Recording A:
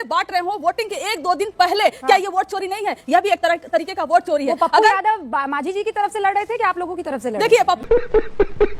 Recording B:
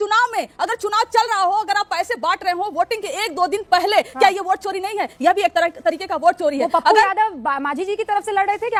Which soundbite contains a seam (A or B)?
A